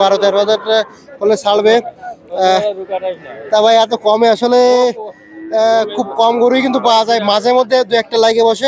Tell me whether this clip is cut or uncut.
uncut